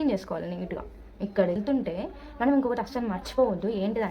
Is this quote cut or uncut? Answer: cut